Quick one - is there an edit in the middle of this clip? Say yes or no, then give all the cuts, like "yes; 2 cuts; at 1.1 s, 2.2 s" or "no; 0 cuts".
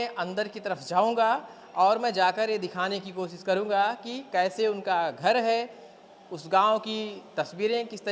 no; 0 cuts